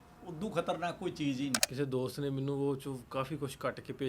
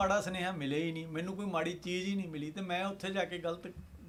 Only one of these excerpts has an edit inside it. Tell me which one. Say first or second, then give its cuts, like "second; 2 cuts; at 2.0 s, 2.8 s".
first; 1 cut; at 1.6 s